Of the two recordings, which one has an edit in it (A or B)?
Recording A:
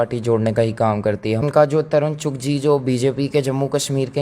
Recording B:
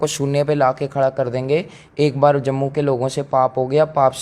A